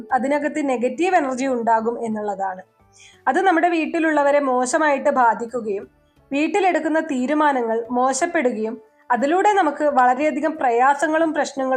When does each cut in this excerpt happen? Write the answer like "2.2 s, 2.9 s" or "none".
none